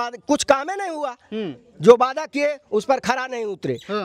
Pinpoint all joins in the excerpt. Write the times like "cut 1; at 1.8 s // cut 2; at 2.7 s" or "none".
none